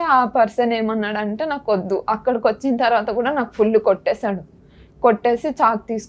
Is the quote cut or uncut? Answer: uncut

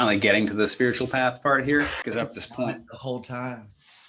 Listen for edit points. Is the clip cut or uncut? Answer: cut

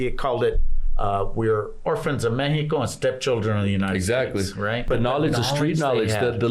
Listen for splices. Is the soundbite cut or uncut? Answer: cut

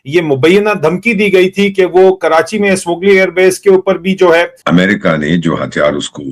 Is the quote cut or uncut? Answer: cut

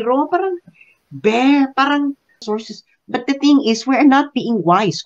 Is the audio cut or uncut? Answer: cut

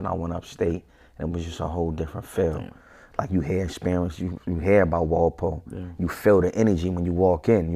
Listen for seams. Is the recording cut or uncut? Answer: uncut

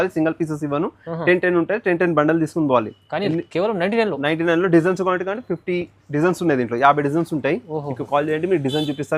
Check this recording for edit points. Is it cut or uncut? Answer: uncut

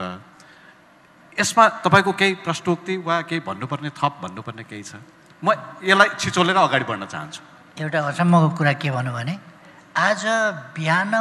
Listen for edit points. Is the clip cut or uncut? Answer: uncut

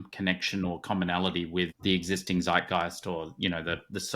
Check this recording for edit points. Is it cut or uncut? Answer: cut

